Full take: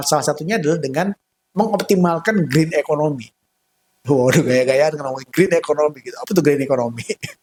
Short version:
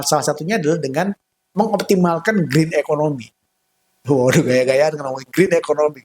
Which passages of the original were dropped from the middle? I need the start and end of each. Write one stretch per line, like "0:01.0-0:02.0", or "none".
none